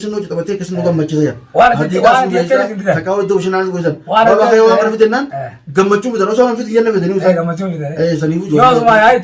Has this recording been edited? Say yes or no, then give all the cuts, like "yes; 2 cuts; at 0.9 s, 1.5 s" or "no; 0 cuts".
no; 0 cuts